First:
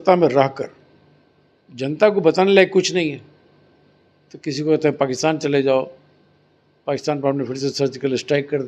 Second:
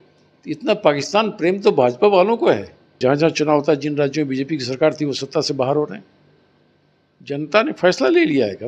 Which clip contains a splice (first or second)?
second